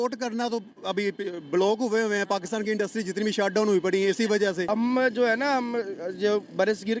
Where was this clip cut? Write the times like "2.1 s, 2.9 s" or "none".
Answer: 4.7 s